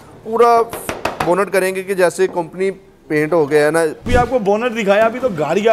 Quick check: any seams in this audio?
yes; 1 cut; at 4.1 s

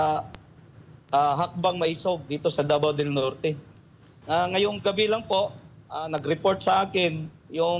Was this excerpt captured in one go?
no; 1 cut; at 3.7 s

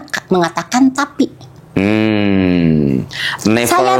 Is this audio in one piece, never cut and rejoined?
yes; 0 cuts

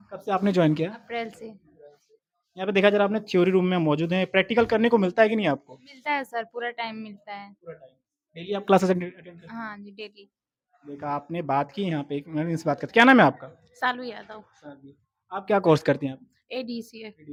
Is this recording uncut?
yes; 0 cuts

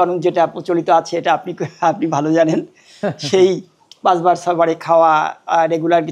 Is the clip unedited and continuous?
yes; 0 cuts

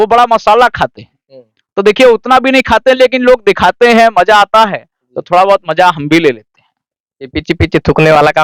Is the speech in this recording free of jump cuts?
yes; 0 cuts

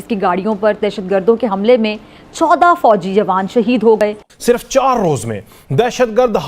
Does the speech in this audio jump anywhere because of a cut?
yes; 1 cut; at 4.3 s

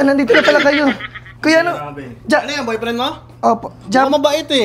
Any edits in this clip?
no; 0 cuts

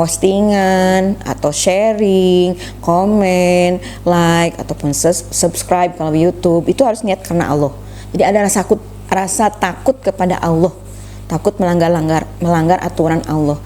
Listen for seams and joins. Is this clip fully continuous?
yes; 0 cuts

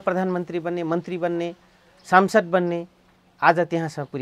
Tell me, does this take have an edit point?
no; 0 cuts

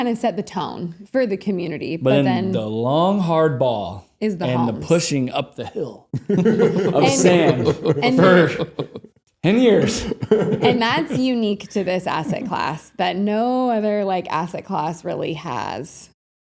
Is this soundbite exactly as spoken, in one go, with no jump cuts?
yes; 0 cuts

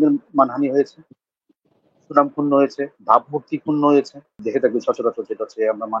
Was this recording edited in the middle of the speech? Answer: yes; 1 cut; at 4.4 s

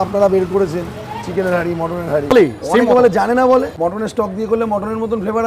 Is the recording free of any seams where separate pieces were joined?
no; 2 cuts; at 2.3 s, 3.7 s

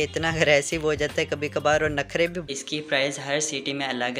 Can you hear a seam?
yes; 1 cut; at 2.5 s

